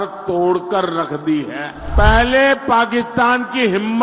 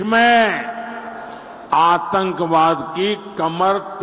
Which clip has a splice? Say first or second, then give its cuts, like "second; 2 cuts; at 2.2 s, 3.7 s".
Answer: first; 1 cut; at 1.8 s